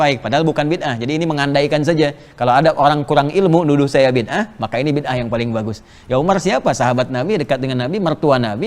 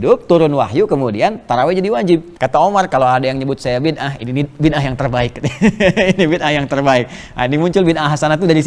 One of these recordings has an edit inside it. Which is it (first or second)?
second